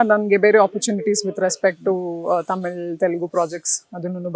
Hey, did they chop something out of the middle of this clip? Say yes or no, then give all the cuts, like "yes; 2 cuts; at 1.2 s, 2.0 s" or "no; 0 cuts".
no; 0 cuts